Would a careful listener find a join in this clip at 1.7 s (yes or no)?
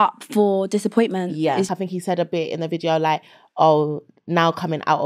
yes